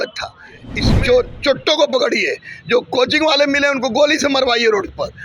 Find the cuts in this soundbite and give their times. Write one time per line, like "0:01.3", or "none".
0:01.0